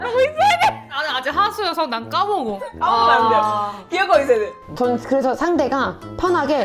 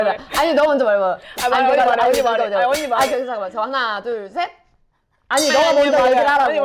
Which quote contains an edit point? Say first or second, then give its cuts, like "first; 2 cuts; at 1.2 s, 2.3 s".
first; 2 cuts; at 1.0 s, 4.6 s